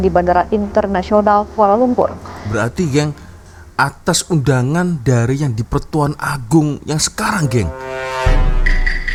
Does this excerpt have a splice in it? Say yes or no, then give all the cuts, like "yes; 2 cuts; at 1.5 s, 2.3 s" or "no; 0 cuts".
no; 0 cuts